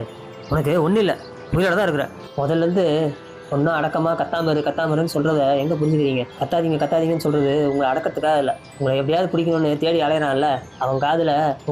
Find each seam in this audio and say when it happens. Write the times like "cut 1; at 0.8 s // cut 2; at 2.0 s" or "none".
cut 1; at 2.2 s